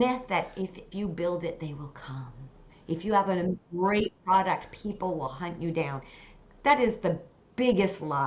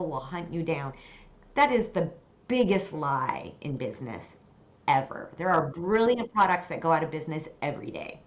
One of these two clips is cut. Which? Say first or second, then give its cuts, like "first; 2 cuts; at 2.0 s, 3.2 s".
first; 2 cuts; at 0.9 s, 4.2 s